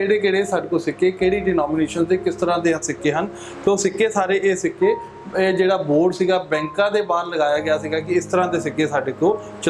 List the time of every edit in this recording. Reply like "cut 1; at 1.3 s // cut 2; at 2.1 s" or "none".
none

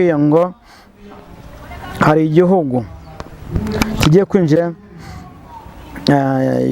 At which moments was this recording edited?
cut 1; at 4.6 s

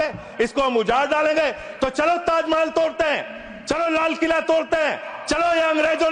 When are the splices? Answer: none

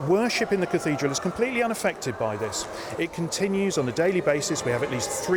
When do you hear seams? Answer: none

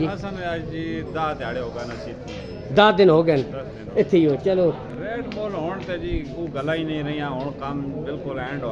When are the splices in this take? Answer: cut 1; at 4.9 s

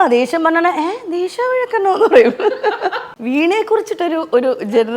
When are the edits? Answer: cut 1; at 2.9 s

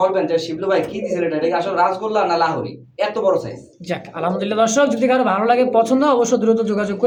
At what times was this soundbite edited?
none

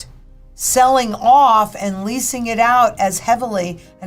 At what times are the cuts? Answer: none

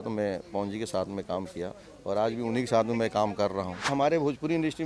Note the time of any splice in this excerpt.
cut 1; at 3.9 s

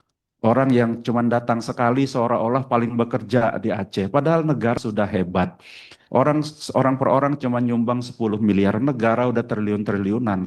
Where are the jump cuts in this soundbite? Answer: cut 1; at 4.8 s

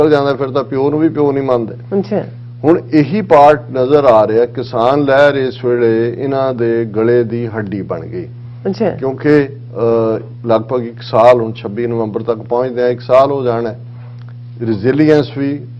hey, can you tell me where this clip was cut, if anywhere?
none

